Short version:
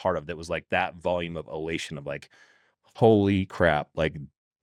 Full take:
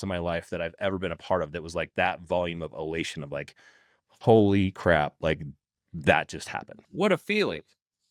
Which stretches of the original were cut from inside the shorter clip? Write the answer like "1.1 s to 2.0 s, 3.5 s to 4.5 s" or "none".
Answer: none